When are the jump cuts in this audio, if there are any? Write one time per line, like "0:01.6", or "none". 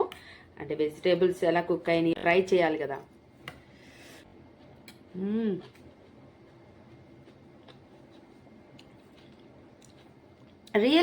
0:02.1
0:04.3